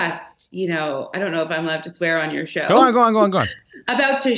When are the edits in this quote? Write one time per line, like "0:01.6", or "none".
none